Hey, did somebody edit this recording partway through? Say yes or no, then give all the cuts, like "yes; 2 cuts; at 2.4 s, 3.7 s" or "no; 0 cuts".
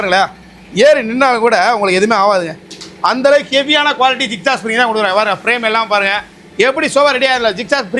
no; 0 cuts